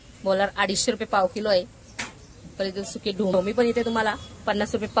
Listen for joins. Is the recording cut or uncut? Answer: cut